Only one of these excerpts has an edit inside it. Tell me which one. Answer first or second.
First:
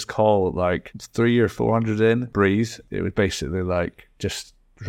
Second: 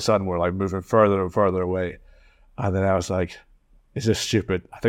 first